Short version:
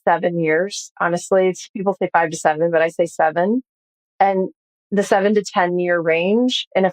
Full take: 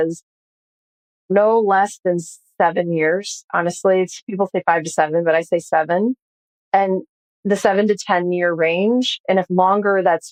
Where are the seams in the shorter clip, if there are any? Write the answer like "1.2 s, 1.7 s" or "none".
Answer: none